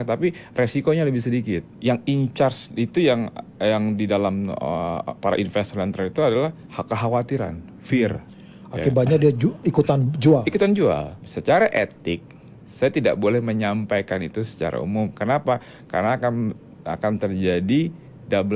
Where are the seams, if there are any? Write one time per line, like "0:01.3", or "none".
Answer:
0:01.7
0:06.7
0:11.2